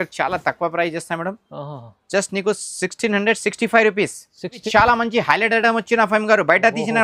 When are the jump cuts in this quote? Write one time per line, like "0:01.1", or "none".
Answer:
0:04.6